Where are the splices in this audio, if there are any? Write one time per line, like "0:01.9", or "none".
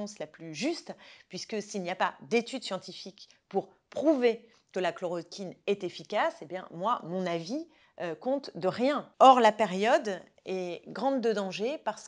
0:09.1